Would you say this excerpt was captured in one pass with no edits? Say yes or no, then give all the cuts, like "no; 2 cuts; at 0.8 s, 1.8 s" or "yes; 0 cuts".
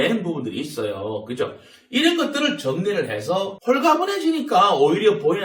no; 1 cut; at 3.5 s